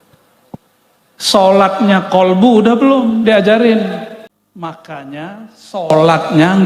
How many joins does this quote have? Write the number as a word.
one